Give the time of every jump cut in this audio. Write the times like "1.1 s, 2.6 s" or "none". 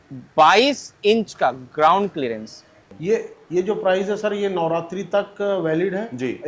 2.9 s